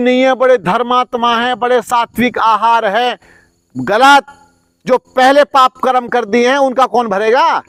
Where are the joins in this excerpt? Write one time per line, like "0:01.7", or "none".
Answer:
none